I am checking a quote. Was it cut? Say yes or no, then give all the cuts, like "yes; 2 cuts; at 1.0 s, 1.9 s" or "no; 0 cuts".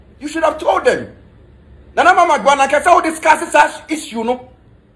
no; 0 cuts